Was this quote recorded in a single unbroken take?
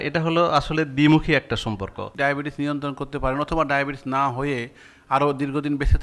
no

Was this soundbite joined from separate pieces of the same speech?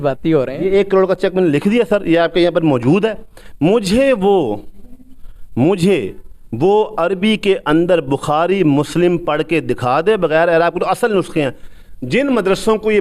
no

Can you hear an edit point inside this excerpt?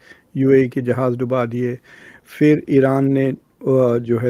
no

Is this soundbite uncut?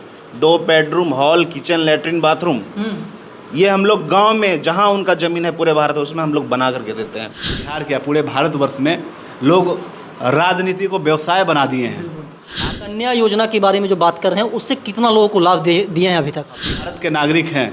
no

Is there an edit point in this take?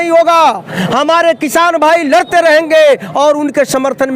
no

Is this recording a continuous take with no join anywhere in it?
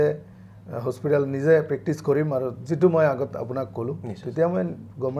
yes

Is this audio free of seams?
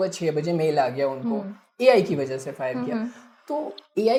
yes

